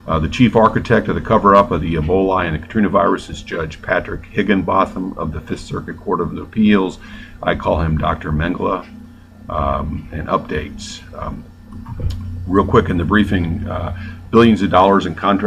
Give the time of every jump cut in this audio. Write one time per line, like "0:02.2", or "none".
0:11.2